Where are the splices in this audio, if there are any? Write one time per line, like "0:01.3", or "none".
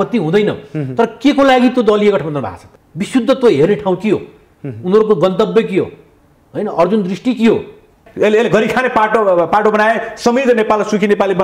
0:08.0